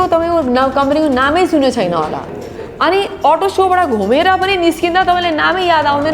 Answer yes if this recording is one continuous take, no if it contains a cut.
yes